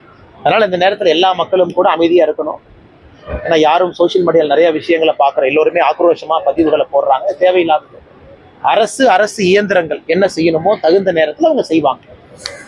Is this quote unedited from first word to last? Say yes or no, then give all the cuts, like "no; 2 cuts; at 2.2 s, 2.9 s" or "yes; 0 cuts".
yes; 0 cuts